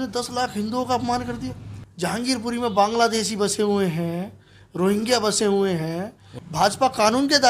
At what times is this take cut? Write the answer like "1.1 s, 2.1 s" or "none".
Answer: none